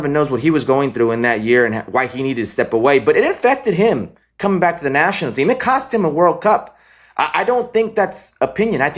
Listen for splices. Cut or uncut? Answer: uncut